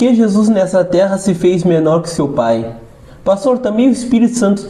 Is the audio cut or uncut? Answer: uncut